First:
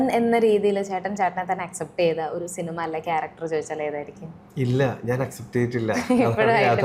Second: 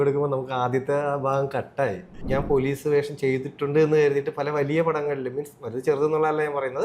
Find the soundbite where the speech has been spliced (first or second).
second